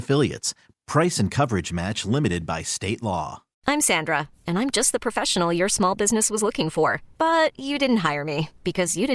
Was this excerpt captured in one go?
no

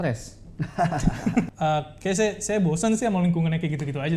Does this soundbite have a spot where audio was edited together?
yes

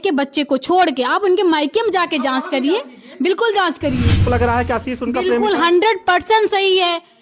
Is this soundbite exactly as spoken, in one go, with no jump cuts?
no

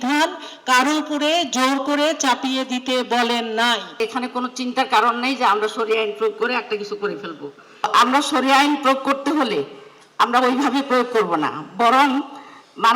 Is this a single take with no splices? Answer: no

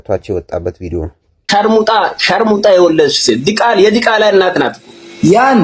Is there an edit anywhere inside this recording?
yes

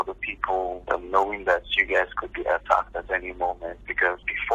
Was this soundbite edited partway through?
no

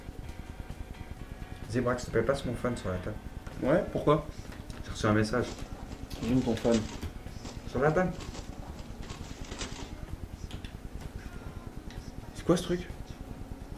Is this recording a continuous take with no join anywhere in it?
yes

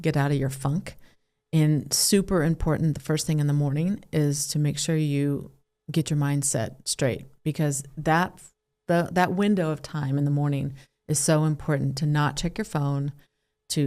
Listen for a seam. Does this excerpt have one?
no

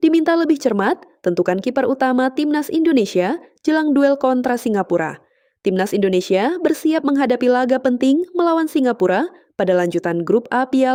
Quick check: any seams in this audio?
no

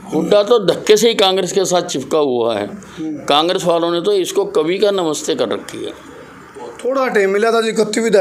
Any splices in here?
no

